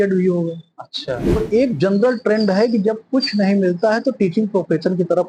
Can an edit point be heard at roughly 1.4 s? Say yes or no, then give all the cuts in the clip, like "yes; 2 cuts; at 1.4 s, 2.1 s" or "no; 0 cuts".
yes; 1 cut; at 1.4 s